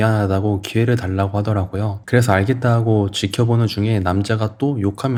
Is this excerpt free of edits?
yes; 0 cuts

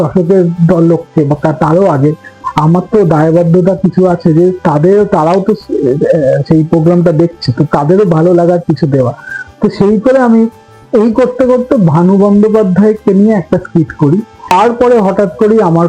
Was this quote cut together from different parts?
yes; 1 cut; at 14.5 s

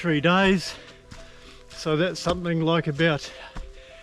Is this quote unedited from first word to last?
yes; 0 cuts

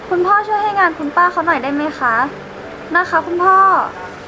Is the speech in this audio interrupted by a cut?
no; 0 cuts

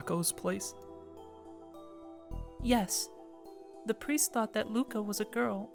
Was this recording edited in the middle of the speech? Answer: no; 0 cuts

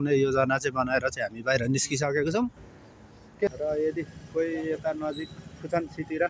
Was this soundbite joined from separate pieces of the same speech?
yes; 1 cut; at 3.5 s

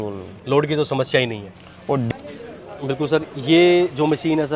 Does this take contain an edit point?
yes; 1 cut; at 2.1 s

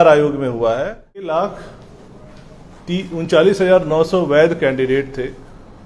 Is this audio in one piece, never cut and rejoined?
no; 1 cut; at 1.3 s

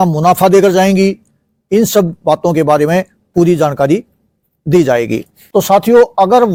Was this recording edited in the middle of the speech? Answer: no; 0 cuts

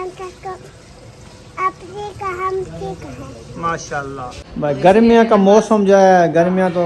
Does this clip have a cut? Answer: yes; 1 cut; at 4.4 s

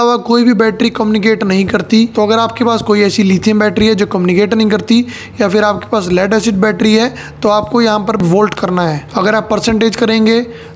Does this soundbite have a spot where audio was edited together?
no; 0 cuts

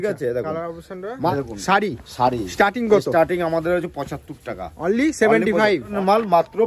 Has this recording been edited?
yes; 2 cuts; at 1.3 s, 5.9 s

